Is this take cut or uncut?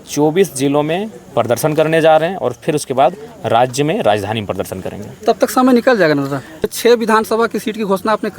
cut